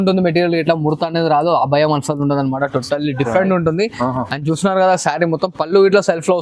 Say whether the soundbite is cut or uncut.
uncut